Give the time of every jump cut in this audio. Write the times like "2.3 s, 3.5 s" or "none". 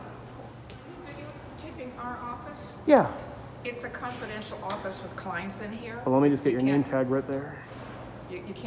0.9 s, 7.6 s

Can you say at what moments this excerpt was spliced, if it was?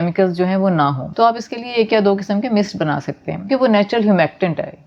1.0 s, 3.5 s

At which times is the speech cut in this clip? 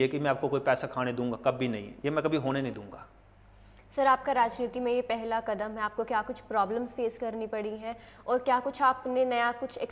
none

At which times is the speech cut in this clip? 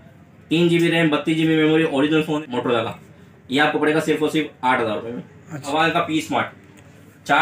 2.4 s, 5.7 s

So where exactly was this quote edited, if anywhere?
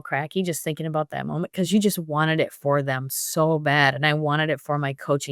none

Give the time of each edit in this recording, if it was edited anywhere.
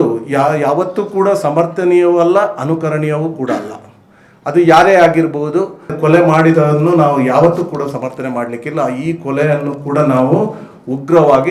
5.9 s

